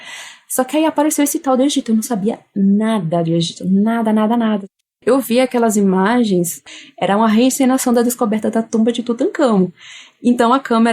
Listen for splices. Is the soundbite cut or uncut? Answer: cut